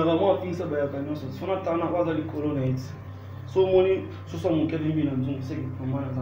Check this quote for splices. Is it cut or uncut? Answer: uncut